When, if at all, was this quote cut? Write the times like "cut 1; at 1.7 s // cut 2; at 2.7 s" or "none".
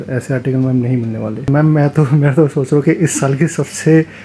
cut 1; at 1.5 s